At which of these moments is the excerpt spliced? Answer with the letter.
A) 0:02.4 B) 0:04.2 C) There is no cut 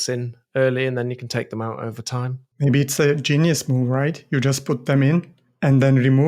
A